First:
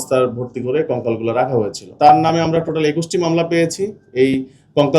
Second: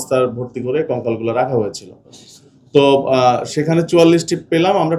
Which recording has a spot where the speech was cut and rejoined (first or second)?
first